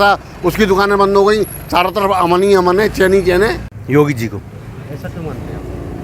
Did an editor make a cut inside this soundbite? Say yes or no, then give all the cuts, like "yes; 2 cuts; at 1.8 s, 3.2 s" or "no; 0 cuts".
yes; 1 cut; at 3.7 s